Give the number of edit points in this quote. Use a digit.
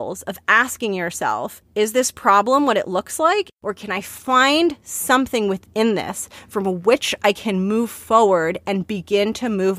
2